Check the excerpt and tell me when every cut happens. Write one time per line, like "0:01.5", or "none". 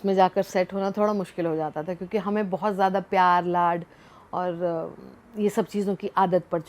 none